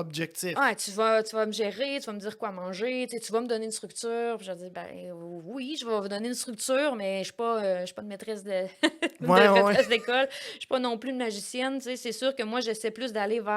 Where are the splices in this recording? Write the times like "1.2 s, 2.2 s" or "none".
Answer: none